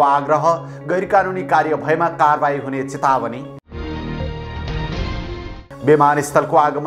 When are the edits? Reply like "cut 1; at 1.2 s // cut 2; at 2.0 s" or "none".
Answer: none